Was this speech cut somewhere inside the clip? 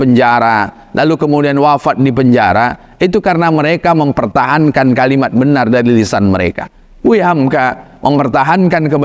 no; 0 cuts

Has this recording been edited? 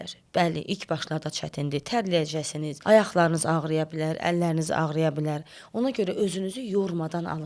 yes; 1 cut; at 2.7 s

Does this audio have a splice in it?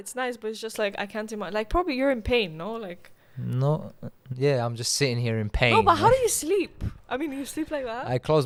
no; 0 cuts

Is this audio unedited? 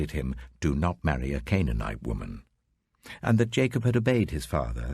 no; 1 cut; at 3.9 s

